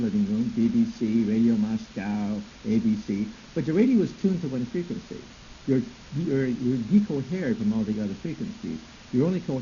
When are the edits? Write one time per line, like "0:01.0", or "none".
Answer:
0:07.4